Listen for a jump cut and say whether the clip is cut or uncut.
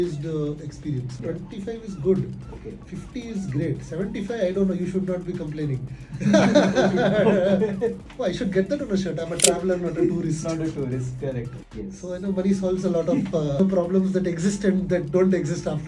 cut